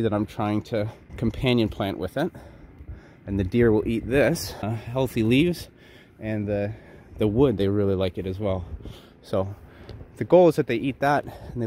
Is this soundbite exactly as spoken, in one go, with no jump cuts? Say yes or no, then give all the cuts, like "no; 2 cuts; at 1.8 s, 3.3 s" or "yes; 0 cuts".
no; 2 cuts; at 1.0 s, 4.8 s